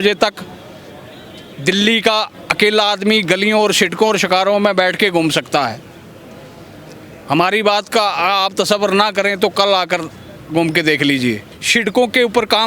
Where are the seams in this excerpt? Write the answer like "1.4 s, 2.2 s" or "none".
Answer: 11.5 s